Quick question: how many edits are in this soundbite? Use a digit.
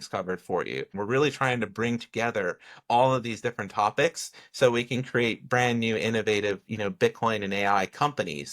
1